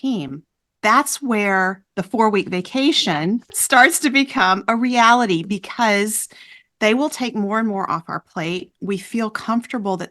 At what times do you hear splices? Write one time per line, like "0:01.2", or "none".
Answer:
0:03.6

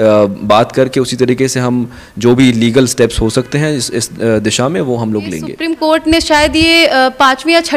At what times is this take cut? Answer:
0:05.8

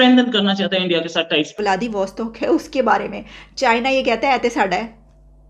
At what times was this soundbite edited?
0:01.6

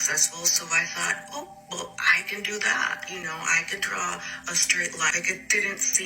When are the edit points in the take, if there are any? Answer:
0:05.1

